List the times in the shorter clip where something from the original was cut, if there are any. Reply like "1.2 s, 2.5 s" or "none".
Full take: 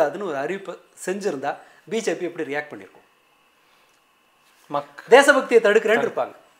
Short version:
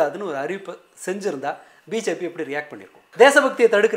3.0 s